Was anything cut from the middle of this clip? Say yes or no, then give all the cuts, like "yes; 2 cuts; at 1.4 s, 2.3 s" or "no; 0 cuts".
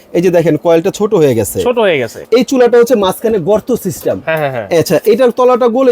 yes; 1 cut; at 2.1 s